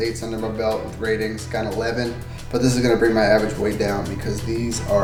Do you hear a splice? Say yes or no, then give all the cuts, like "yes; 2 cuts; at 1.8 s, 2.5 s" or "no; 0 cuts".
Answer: no; 0 cuts